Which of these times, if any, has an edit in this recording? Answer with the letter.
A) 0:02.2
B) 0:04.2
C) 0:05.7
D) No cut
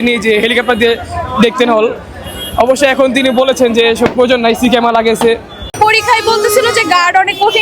C